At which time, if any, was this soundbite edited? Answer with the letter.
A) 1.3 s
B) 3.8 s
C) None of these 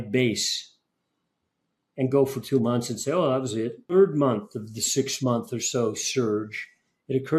B